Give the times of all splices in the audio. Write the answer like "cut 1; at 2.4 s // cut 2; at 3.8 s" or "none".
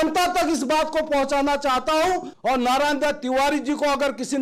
cut 1; at 2.3 s